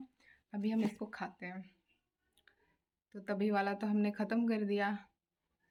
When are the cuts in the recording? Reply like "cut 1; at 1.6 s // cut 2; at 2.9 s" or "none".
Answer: none